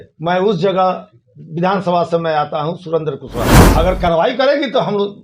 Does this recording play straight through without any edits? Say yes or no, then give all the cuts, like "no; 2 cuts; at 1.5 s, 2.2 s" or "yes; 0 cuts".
no; 1 cut; at 3.6 s